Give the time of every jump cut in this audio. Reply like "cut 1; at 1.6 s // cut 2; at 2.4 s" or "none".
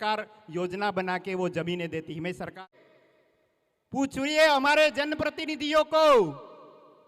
cut 1; at 2.5 s